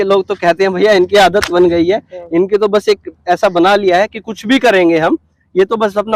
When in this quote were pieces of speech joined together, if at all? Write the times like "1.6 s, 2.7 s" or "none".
none